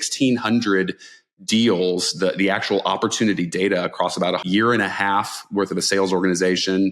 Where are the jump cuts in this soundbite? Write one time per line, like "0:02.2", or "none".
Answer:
0:04.4